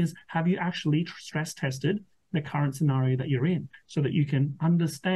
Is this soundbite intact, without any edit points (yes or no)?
no